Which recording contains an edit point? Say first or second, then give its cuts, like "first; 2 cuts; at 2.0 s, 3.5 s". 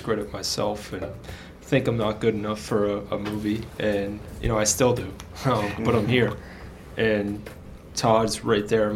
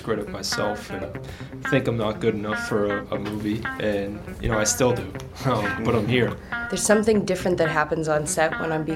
second; 1 cut; at 6.5 s